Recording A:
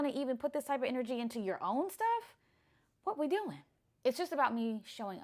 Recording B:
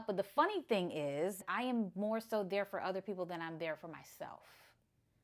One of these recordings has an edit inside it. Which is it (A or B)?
B